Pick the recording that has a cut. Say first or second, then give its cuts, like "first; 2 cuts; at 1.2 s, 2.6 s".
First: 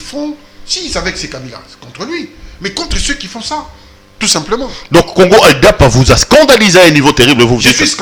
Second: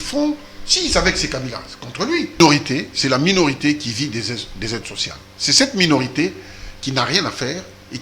second; 1 cut; at 2.4 s